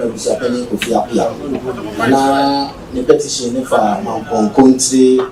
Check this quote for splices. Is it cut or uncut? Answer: uncut